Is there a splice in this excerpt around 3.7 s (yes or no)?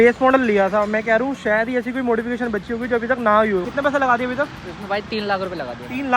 yes